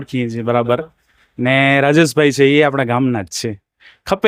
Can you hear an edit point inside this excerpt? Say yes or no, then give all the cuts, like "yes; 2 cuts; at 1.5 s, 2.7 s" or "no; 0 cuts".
no; 0 cuts